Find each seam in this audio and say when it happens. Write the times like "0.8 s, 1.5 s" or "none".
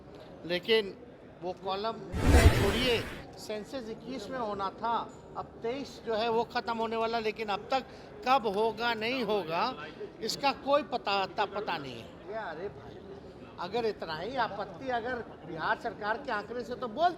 12.2 s